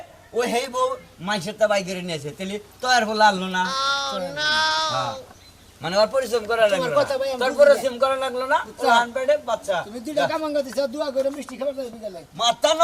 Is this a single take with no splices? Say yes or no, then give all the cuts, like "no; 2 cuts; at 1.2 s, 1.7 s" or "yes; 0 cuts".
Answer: yes; 0 cuts